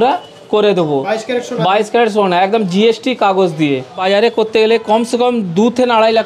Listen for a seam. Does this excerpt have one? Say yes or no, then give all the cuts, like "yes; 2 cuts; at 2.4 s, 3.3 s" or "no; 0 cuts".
yes; 1 cut; at 3.9 s